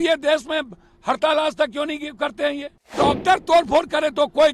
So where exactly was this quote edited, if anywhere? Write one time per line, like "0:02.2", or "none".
0:02.9